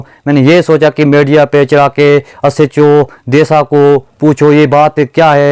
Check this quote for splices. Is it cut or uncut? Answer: uncut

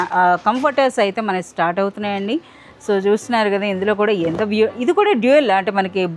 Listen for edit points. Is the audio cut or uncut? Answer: uncut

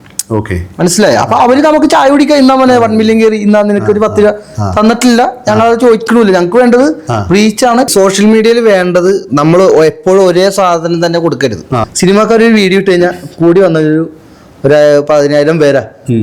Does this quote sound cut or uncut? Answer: cut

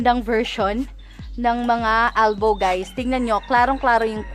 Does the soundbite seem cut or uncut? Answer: uncut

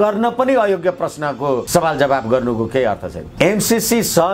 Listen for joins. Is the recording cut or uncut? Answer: cut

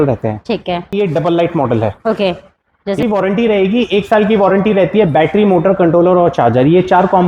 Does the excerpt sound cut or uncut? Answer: cut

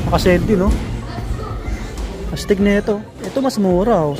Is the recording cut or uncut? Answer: cut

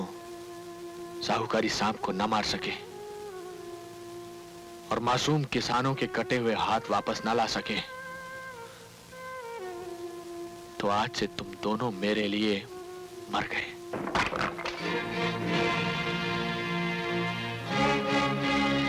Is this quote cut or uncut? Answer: uncut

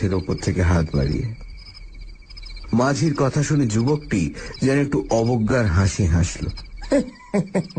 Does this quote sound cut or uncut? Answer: uncut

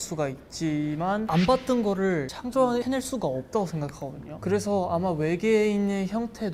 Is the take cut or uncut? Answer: uncut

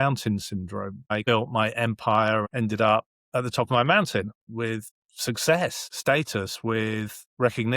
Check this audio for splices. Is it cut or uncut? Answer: cut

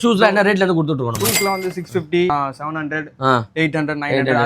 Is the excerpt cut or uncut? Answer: cut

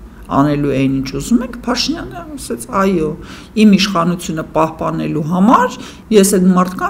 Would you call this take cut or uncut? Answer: cut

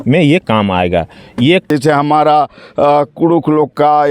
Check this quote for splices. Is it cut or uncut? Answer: cut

